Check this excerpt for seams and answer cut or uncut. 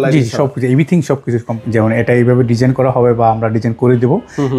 cut